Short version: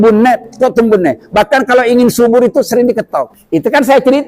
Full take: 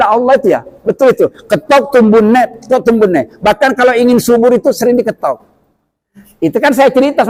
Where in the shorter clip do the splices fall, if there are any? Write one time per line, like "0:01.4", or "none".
0:03.4